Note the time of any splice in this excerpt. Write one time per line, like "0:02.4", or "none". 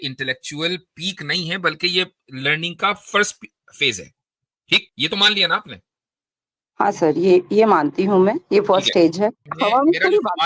0:04.9
0:09.5